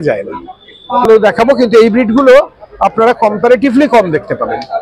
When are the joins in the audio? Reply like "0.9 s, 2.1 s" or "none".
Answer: 1.1 s